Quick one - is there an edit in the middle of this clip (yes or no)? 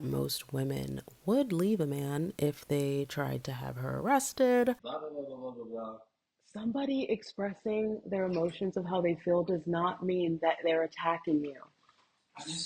yes